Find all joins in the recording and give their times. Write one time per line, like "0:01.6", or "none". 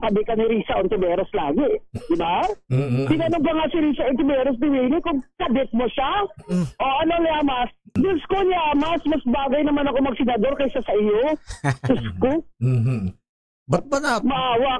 0:07.9